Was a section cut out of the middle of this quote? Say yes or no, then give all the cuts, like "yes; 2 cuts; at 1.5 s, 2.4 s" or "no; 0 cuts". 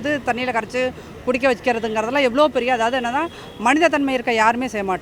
no; 0 cuts